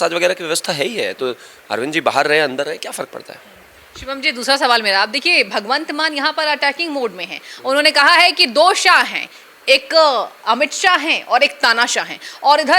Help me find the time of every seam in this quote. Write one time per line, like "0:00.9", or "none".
none